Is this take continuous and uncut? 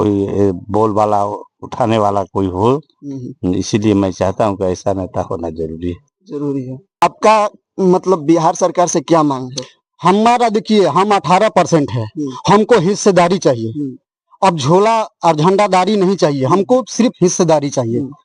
no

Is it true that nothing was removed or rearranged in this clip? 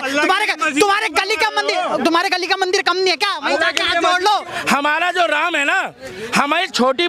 no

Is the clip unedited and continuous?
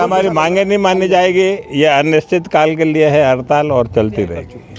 yes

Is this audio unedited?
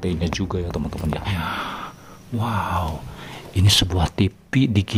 no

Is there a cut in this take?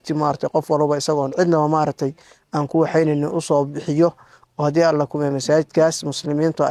no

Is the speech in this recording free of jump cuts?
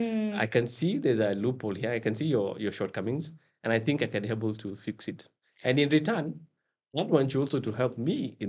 yes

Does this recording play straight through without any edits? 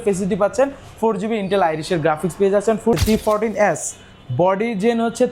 no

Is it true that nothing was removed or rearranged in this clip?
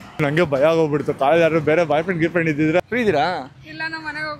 no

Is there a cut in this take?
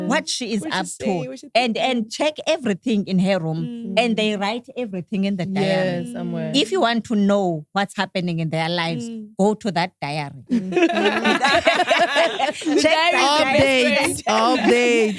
no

